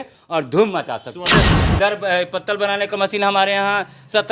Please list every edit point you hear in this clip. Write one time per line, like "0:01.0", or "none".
0:01.5